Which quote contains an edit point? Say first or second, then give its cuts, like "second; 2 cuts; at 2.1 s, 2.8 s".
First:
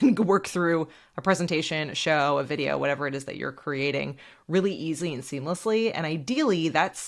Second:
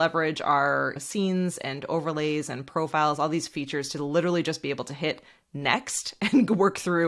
second; 1 cut; at 1.0 s